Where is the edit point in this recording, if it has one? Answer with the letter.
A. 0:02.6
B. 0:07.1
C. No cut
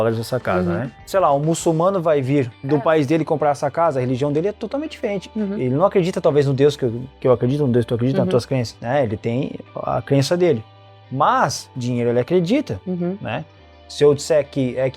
A